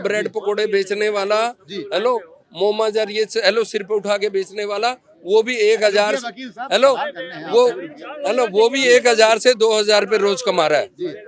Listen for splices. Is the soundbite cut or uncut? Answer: uncut